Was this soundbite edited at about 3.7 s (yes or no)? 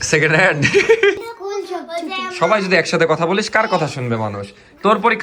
no